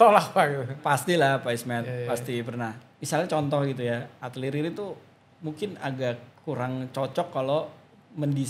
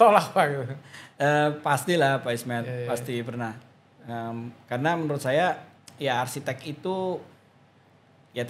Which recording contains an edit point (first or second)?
first